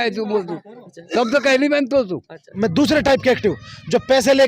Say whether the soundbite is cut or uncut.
cut